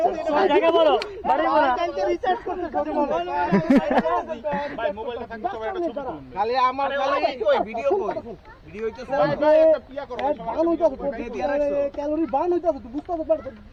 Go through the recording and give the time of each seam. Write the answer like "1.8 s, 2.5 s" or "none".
none